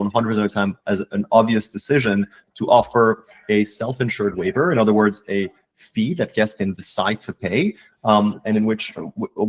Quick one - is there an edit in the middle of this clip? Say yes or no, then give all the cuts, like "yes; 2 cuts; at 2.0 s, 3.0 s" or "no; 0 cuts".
no; 0 cuts